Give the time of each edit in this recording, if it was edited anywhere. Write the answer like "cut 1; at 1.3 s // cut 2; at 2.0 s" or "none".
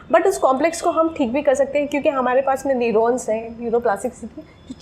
none